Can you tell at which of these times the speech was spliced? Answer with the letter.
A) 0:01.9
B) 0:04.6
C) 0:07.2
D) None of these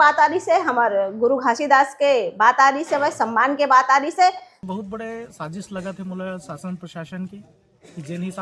B